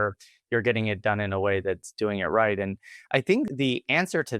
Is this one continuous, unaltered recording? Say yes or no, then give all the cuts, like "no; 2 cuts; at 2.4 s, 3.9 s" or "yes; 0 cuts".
no; 1 cut; at 3.5 s